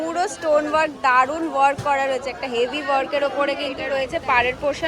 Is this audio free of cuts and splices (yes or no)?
no